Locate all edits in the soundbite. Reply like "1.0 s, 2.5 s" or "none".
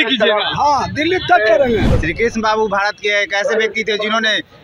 1.9 s